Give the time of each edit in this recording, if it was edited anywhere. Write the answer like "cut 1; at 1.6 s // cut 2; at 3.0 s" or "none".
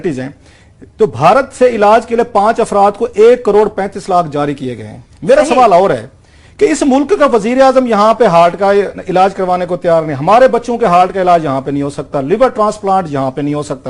cut 1; at 3.3 s